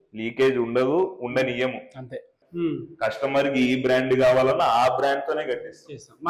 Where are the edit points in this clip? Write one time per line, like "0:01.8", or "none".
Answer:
0:02.4

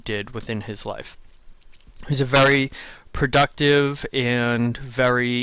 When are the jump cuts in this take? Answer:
none

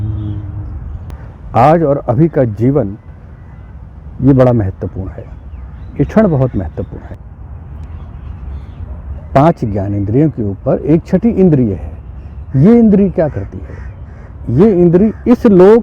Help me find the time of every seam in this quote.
0:01.1
0:07.2

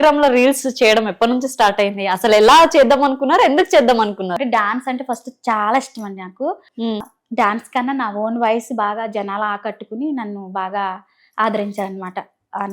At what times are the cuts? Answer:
0:04.4
0:07.0

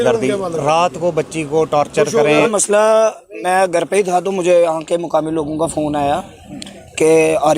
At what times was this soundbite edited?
0:02.5

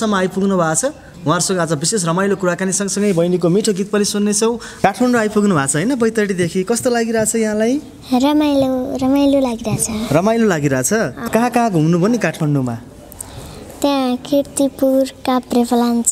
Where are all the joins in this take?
0:04.7
0:11.2

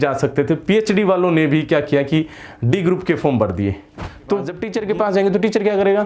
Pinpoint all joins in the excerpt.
0:04.7

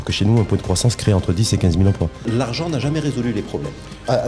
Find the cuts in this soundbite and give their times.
0:02.3

